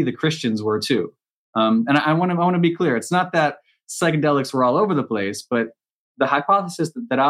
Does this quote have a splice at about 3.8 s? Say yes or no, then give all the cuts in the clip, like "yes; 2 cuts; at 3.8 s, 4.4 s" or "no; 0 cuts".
no; 1 cut; at 6.1 s